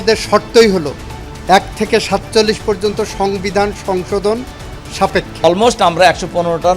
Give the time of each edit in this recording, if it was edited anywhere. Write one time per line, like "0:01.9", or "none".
0:05.4